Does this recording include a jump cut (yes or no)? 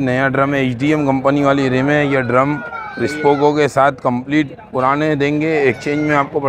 no